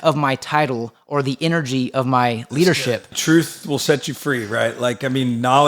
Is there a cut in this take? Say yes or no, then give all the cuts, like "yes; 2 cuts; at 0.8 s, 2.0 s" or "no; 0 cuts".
yes; 1 cut; at 3.2 s